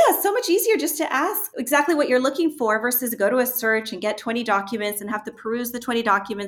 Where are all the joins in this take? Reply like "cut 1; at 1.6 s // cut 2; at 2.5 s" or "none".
cut 1; at 1.5 s